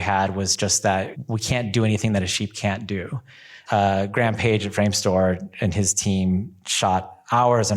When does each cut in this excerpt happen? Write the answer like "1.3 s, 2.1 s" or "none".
1.2 s, 3.6 s